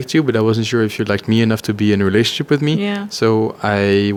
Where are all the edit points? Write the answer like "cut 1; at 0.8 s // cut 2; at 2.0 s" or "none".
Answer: none